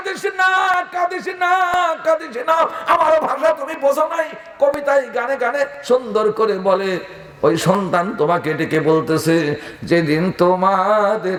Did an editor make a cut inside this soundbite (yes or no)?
no